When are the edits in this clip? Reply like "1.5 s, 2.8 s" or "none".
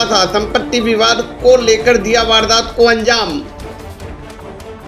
3.4 s